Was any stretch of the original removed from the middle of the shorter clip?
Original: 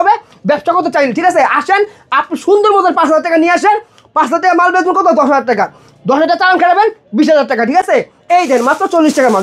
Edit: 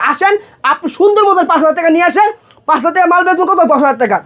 no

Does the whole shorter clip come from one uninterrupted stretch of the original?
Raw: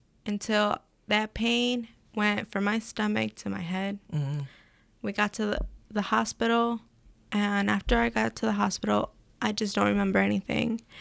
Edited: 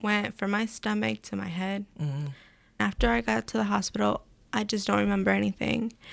no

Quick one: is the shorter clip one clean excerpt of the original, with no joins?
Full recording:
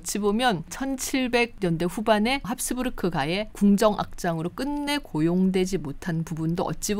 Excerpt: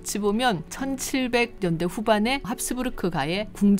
yes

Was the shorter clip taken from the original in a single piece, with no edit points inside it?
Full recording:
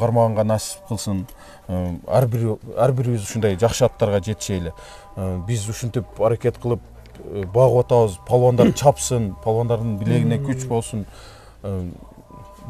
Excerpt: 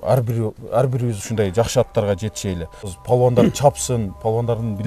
no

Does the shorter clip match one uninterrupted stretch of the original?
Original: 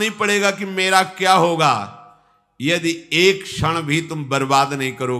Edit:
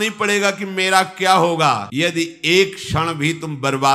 no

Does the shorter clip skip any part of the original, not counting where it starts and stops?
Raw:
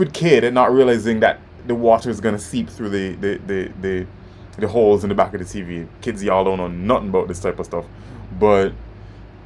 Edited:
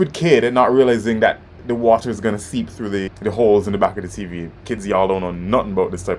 yes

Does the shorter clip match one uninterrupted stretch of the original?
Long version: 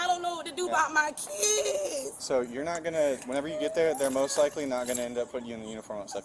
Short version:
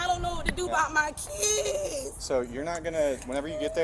yes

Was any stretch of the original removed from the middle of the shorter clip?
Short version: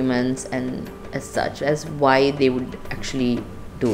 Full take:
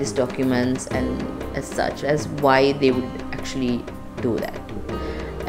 no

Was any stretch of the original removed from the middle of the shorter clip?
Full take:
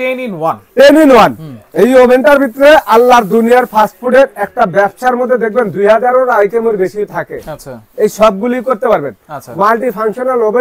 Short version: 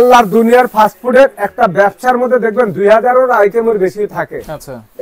no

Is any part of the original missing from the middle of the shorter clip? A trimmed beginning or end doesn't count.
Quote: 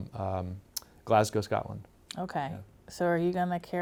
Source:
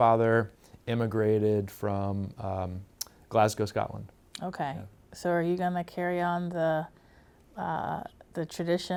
no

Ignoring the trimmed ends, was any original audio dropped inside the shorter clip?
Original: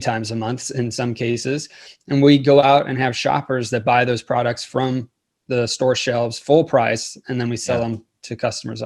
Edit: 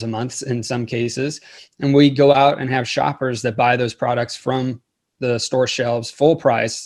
no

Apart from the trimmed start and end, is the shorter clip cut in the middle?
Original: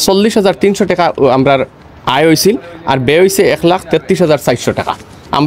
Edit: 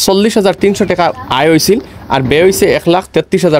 yes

